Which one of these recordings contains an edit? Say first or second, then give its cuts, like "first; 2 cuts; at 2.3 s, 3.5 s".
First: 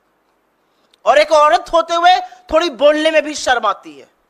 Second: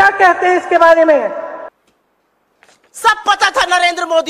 second; 1 cut; at 1.7 s